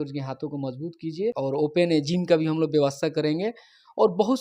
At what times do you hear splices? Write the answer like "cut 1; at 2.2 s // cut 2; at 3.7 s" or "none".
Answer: cut 1; at 1.4 s